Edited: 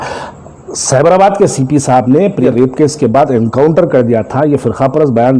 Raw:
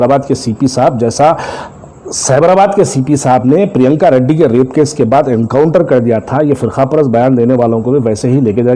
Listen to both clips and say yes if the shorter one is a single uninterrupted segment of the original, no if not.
no